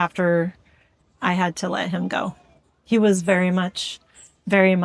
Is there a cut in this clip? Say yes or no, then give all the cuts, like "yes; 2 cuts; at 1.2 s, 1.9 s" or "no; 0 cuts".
no; 0 cuts